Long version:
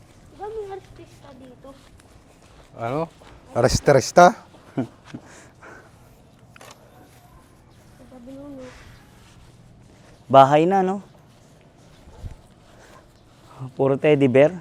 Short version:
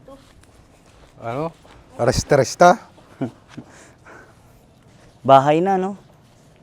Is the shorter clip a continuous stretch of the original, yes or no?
no